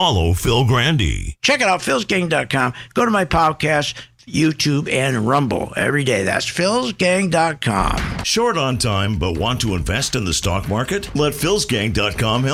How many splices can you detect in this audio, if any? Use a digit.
0